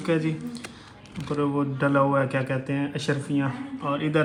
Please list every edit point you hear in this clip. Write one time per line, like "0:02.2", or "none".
none